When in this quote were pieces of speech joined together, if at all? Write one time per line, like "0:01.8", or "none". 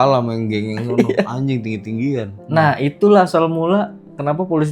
0:02.4